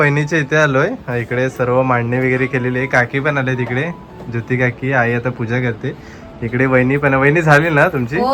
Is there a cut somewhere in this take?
no; 0 cuts

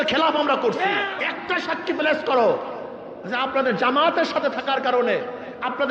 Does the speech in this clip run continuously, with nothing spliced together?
no; 1 cut; at 1.1 s

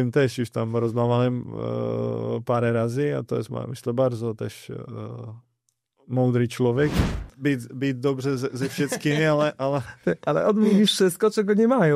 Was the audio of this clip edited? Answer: yes; 1 cut; at 7.0 s

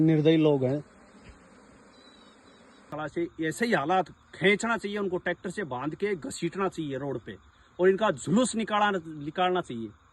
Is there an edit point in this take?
yes; 1 cut; at 2.9 s

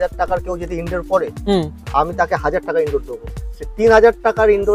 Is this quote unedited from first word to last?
yes; 0 cuts

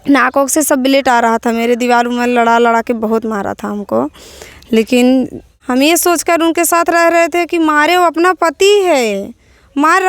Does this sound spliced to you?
yes; 1 cut; at 5.6 s

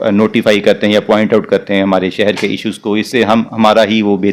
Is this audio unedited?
yes; 0 cuts

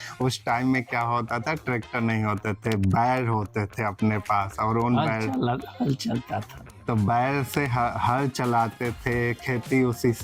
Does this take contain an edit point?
no; 0 cuts

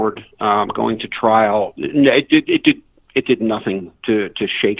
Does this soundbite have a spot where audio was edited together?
no; 0 cuts

